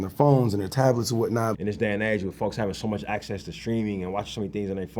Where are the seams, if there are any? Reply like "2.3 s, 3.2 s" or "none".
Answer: 1.5 s

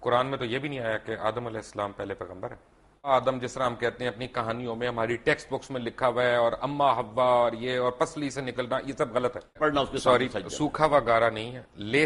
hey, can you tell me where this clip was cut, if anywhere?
3.1 s, 9.6 s

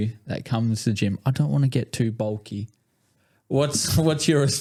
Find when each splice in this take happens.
none

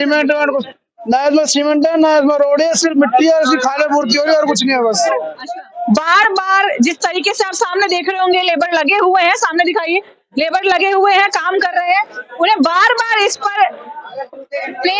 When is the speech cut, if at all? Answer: 5.3 s

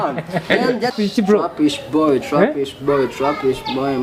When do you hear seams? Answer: 0.9 s

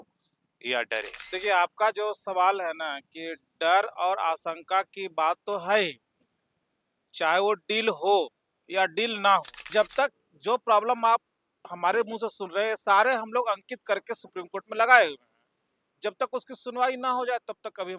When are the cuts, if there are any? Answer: 1.2 s, 9.6 s

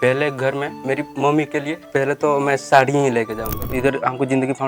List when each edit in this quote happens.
1.0 s, 1.8 s, 3.7 s

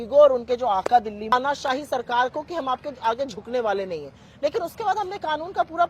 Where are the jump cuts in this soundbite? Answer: 1.3 s

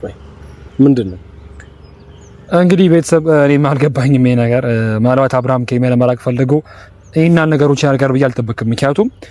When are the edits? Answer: none

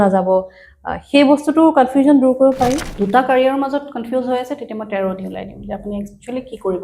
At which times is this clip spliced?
2.9 s

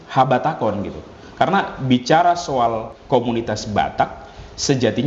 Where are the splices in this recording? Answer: 2.9 s

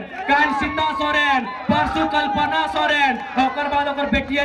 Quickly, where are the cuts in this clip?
none

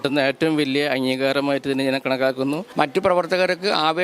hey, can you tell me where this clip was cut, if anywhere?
2.7 s

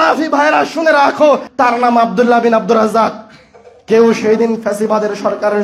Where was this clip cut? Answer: 1.5 s

